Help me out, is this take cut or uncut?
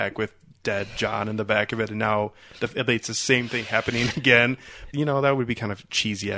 cut